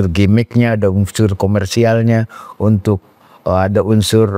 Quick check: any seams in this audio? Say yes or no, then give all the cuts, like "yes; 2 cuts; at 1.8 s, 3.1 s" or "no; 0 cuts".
no; 0 cuts